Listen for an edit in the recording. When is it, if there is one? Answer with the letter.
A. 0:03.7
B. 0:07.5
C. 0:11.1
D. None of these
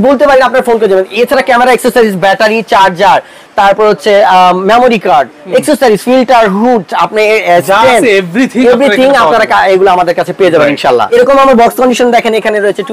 C